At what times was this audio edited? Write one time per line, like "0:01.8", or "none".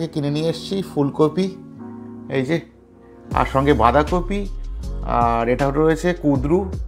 none